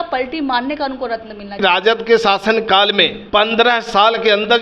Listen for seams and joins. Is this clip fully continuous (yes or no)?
no